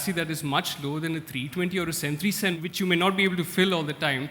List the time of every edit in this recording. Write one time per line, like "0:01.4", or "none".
0:02.6